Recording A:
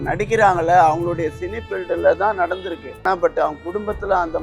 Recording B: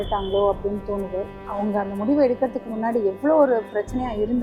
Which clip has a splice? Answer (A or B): A